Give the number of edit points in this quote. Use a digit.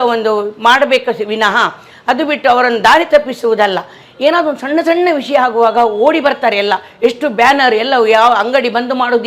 1